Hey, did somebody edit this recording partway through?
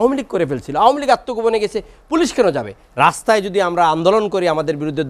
yes; 1 cut; at 2.8 s

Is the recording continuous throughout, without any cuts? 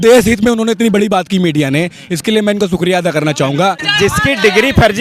no; 1 cut; at 3.9 s

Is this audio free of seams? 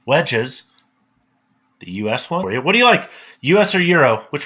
no; 1 cut; at 2.4 s

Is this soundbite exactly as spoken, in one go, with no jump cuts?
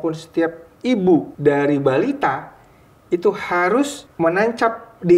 no; 2 cuts; at 1.3 s, 4.0 s

